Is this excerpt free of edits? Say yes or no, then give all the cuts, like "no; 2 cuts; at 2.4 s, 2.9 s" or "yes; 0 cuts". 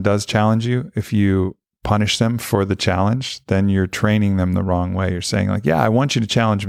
yes; 0 cuts